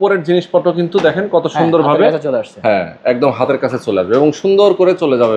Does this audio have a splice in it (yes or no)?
no